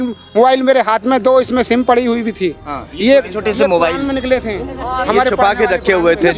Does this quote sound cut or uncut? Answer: uncut